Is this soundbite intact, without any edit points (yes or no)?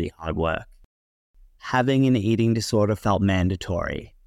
no